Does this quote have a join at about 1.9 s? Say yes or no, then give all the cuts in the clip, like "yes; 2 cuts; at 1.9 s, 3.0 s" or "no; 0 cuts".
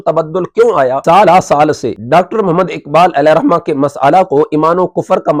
yes; 2 cuts; at 1.0 s, 1.9 s